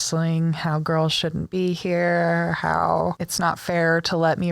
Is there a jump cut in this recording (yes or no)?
yes